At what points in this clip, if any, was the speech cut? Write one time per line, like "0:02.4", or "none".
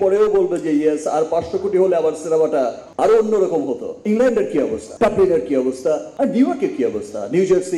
0:04.0
0:04.8